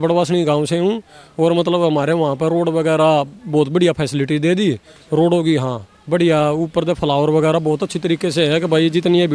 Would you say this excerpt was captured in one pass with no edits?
yes; 0 cuts

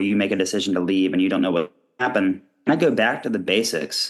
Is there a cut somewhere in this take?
yes; 1 cut; at 2.5 s

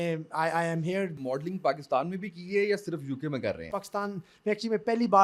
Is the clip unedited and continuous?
no; 2 cuts; at 1.3 s, 3.7 s

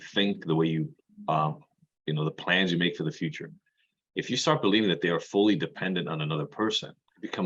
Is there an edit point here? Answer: no; 0 cuts

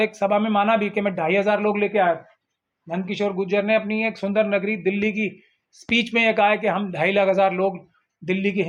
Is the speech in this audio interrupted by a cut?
no; 0 cuts

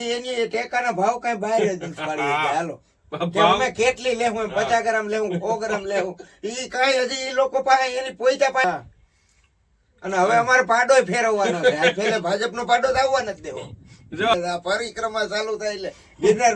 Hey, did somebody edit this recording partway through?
yes; 2 cuts; at 8.6 s, 14.3 s

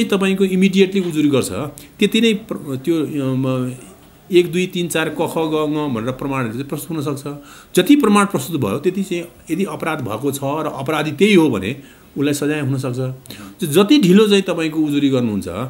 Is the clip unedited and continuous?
yes; 0 cuts

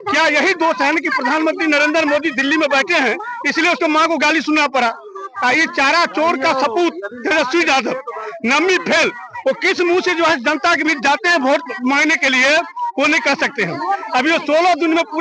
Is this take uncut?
yes; 0 cuts

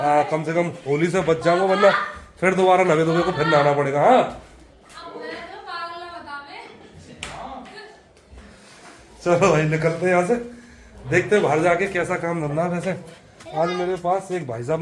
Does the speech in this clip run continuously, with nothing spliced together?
yes; 0 cuts

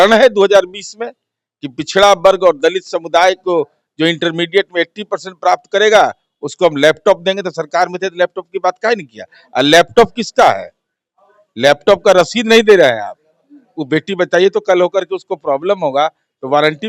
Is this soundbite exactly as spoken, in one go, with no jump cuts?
yes; 0 cuts

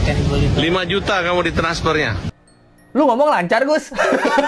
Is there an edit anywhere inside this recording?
yes; 1 cut; at 2.2 s

